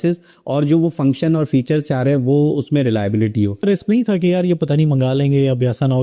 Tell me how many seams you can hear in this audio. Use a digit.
1